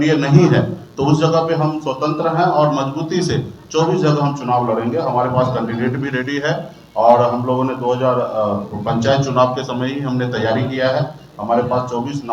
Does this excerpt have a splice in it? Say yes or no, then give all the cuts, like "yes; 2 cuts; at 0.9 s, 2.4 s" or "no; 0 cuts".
no; 0 cuts